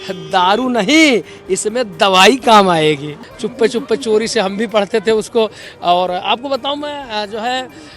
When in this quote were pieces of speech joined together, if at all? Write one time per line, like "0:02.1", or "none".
0:03.2

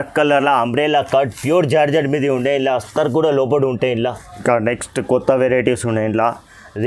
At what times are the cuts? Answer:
0:04.3

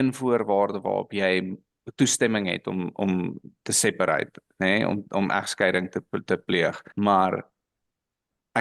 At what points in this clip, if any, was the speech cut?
none

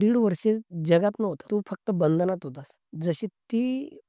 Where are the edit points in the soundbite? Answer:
0:01.4

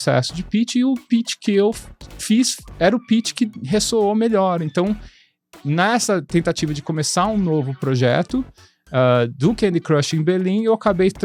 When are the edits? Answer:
none

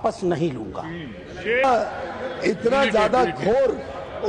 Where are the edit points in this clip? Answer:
0:01.6

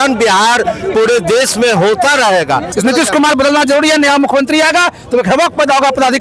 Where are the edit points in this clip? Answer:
0:02.7

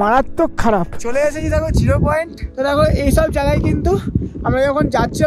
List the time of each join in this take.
0:01.0
0:02.4

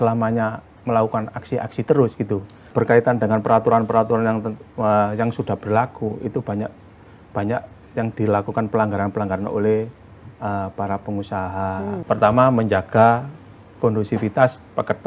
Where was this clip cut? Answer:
0:02.7
0:11.9

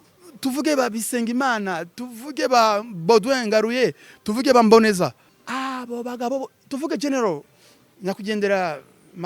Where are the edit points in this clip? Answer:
0:05.3

